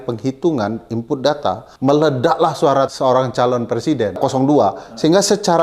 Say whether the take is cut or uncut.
cut